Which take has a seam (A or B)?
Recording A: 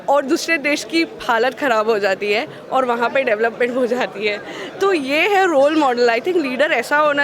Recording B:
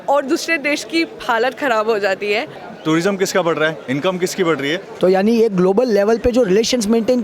B